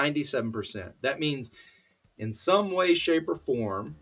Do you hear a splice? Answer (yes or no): no